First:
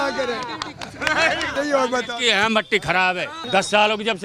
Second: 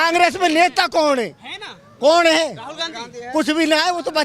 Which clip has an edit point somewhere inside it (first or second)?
first